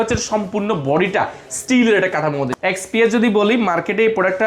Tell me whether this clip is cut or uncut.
cut